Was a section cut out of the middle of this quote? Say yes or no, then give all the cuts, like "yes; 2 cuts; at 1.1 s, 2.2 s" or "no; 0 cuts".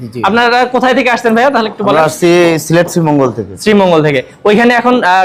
no; 0 cuts